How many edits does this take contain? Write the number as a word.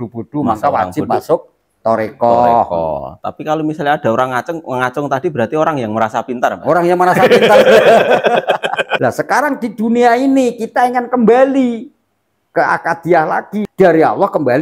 two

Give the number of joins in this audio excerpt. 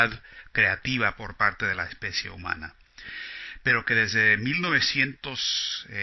one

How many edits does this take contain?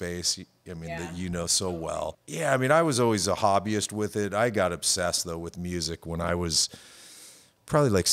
one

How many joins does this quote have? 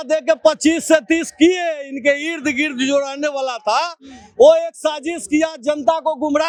zero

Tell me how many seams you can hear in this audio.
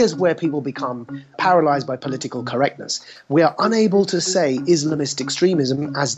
one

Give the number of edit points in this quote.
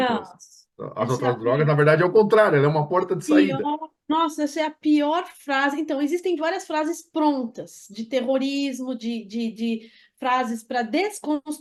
zero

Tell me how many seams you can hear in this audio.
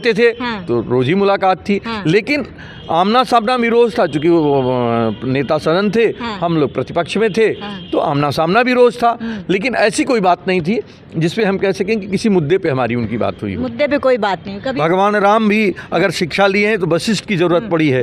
one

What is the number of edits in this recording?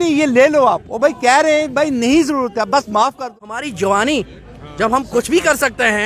one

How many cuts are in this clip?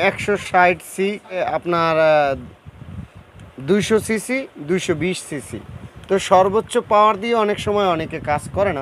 one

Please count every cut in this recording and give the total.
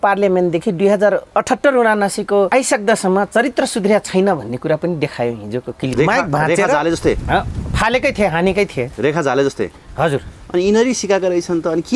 three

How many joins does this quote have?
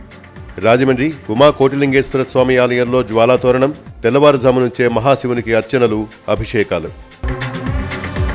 zero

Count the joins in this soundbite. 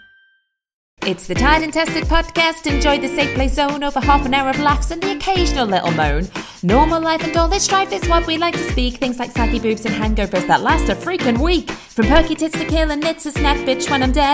one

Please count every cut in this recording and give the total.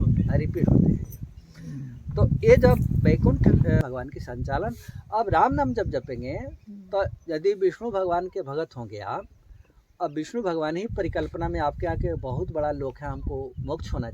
one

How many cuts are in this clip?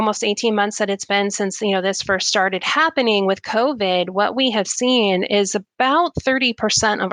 zero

